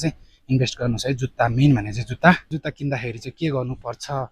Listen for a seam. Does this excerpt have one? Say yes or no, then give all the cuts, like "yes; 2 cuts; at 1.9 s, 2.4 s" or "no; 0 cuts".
yes; 1 cut; at 2.4 s